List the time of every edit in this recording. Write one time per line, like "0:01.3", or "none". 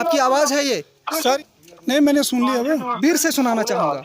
0:01.4